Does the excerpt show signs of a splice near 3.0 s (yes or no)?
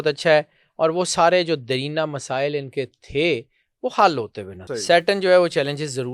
no